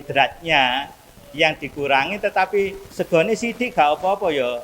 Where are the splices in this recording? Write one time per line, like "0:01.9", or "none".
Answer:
0:02.9